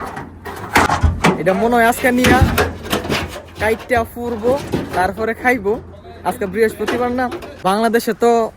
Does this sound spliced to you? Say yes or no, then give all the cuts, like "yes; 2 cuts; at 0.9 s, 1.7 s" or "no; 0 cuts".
yes; 1 cut; at 7.5 s